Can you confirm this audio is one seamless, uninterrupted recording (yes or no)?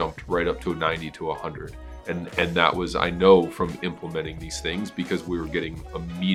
yes